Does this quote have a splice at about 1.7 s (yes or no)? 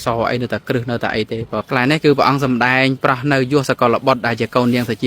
yes